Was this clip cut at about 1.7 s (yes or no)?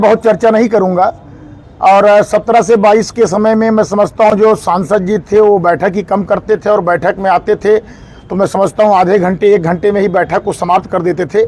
no